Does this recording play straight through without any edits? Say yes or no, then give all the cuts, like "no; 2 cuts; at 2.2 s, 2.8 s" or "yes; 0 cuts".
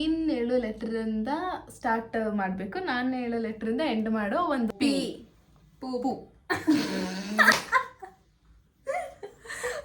no; 1 cut; at 4.7 s